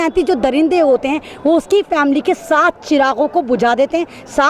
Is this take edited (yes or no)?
no